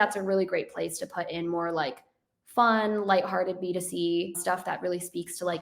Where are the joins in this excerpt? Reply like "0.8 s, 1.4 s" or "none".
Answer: 4.4 s